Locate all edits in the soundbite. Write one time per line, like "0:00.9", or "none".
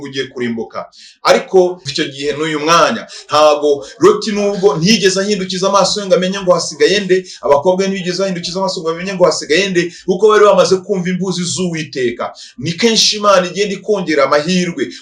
0:01.9